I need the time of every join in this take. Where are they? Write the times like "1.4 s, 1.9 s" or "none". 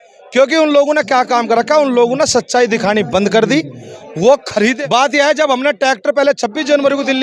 4.8 s